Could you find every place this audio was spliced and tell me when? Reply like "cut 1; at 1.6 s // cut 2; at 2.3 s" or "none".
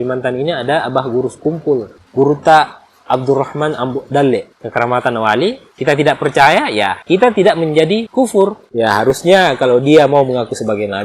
cut 1; at 2.0 s // cut 2; at 4.6 s // cut 3; at 8.7 s